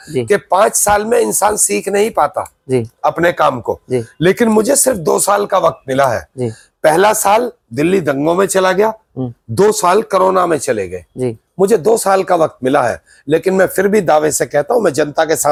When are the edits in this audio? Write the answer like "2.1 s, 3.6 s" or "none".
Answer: none